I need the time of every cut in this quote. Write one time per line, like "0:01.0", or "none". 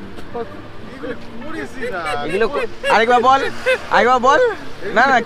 none